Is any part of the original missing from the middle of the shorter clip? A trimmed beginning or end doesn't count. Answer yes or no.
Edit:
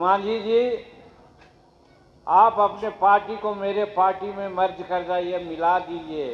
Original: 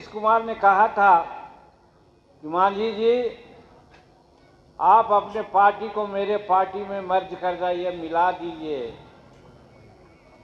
no